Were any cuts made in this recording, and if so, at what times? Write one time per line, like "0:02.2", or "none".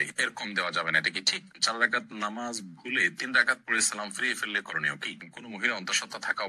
0:01.5
0:05.3